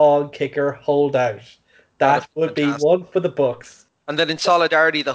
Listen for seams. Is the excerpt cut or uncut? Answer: cut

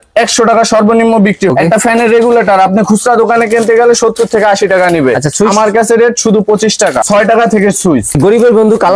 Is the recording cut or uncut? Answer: cut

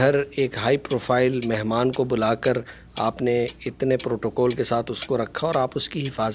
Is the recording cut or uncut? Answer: uncut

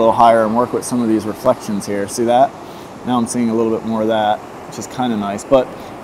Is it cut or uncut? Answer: uncut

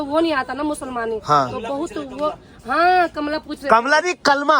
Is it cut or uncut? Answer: uncut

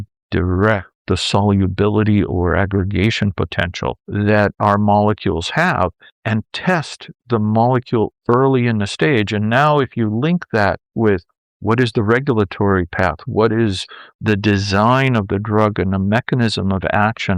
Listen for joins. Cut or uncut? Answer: uncut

